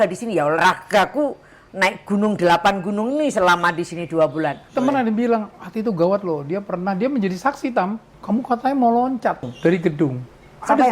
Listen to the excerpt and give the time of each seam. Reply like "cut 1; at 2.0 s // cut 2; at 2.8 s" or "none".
cut 1; at 4.7 s // cut 2; at 8.1 s // cut 3; at 9.5 s

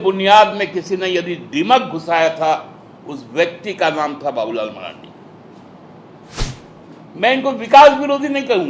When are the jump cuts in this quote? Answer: cut 1; at 6.4 s

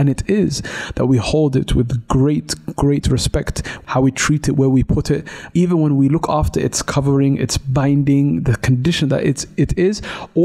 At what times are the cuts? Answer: cut 1; at 3.7 s // cut 2; at 5.4 s

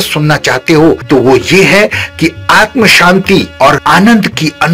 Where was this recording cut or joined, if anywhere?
cut 1; at 1.0 s // cut 2; at 3.8 s

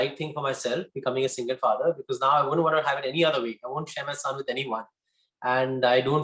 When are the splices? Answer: none

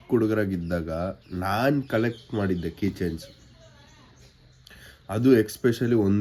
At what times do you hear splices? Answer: none

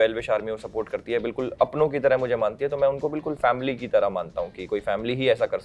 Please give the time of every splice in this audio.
none

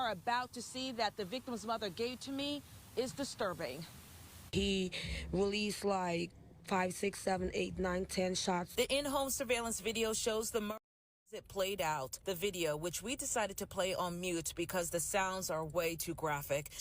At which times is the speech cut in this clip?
cut 1; at 11.2 s

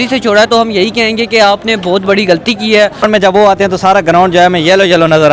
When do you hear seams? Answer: cut 1; at 3.0 s

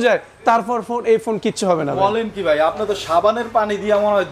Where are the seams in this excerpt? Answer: none

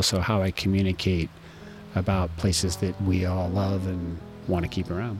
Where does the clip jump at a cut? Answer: cut 1; at 3.0 s // cut 2; at 4.3 s

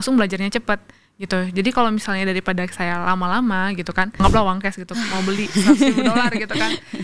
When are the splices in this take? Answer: cut 1; at 4.1 s

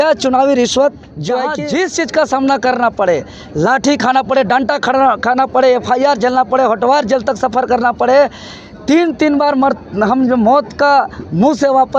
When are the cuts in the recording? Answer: cut 1; at 1.5 s

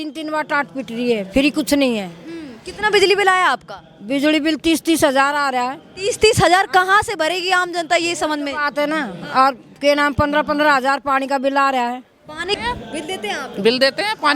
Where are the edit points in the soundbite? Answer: cut 1; at 12.6 s

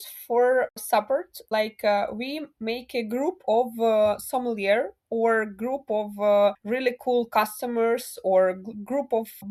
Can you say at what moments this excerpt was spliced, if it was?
none

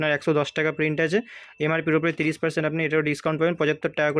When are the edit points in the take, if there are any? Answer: none

